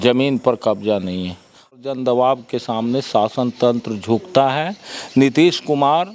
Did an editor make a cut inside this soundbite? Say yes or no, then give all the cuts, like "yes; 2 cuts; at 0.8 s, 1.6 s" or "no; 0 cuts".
yes; 1 cut; at 1.7 s